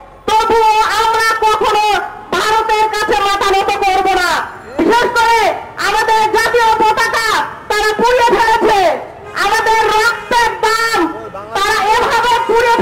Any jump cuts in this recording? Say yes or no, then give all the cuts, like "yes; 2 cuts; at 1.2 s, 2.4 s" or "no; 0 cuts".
no; 0 cuts